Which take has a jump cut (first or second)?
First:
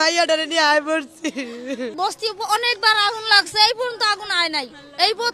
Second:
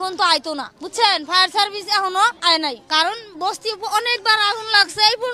first